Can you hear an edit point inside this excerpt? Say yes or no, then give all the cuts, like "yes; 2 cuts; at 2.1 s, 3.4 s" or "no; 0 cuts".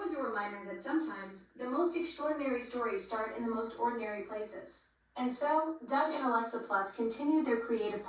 yes; 1 cut; at 4.9 s